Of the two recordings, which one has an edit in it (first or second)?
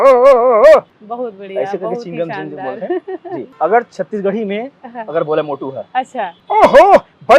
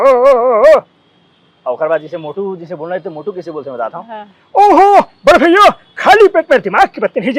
first